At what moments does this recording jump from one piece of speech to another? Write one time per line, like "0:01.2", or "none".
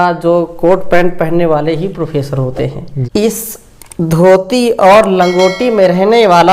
0:02.9